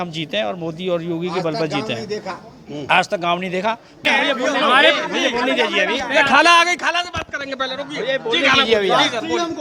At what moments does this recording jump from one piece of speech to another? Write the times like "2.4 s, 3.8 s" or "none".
none